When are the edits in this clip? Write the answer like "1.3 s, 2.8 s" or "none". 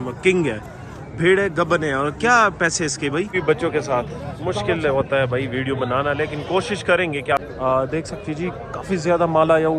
3.3 s, 7.4 s